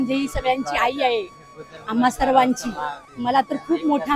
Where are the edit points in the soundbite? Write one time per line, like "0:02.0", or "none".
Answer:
0:03.0